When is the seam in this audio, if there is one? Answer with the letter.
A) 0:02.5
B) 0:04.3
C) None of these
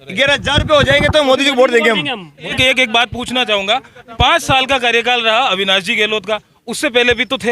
A